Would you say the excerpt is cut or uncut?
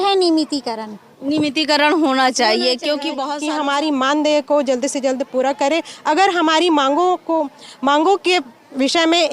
cut